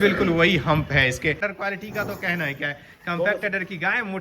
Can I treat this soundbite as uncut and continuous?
no; 1 cut; at 1.5 s

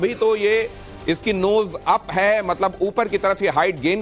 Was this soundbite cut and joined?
no; 0 cuts

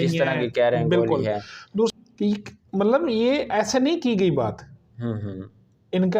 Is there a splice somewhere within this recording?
yes; 1 cut; at 1.9 s

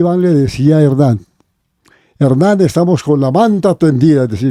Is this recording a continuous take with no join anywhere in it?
yes; 0 cuts

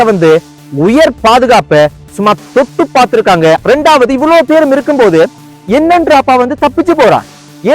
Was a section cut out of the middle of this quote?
yes; 1 cut; at 3.6 s

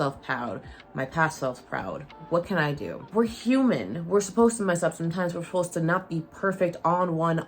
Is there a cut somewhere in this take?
yes; 1 cut; at 3.1 s

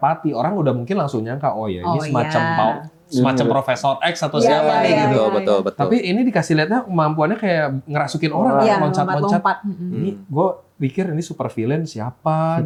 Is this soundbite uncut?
yes; 0 cuts

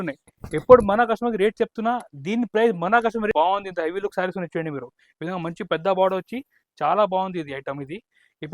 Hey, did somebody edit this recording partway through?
yes; 1 cut; at 3.3 s

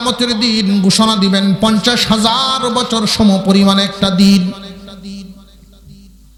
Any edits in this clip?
no; 0 cuts

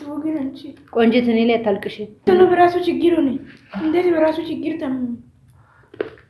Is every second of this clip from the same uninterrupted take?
no; 1 cut; at 2.2 s

